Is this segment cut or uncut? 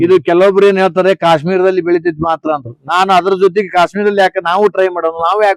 uncut